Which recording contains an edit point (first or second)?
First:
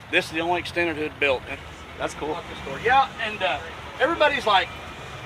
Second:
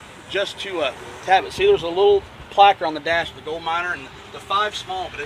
first